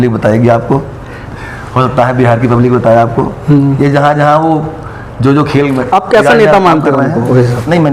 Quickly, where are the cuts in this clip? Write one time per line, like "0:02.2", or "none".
none